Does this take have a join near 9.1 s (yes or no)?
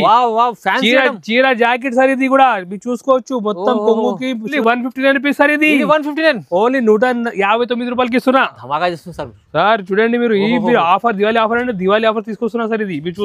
no